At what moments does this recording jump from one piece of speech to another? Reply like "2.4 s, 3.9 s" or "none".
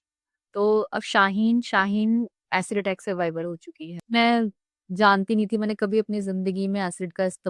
3.9 s

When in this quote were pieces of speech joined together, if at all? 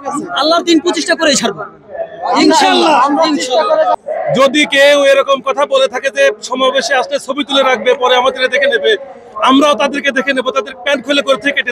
3.9 s

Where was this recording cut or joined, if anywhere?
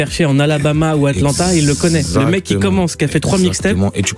none

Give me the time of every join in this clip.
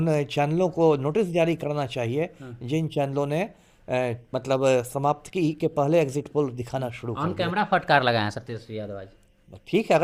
none

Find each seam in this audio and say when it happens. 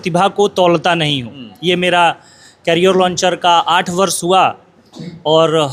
none

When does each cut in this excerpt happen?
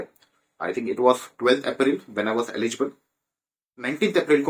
none

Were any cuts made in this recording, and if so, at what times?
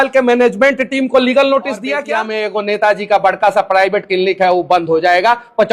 2.0 s

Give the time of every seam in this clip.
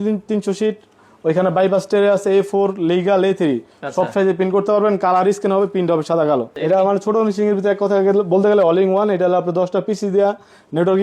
6.5 s

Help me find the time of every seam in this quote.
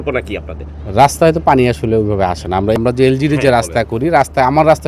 none

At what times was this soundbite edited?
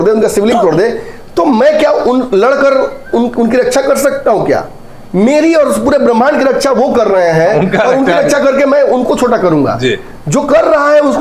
none

